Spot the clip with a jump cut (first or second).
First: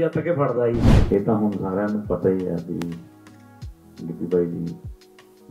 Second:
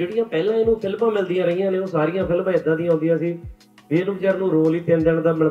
first